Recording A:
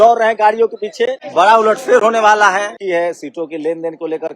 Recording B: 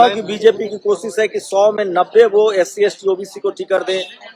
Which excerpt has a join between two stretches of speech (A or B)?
A